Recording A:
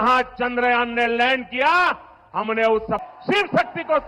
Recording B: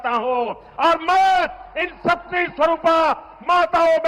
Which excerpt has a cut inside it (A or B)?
A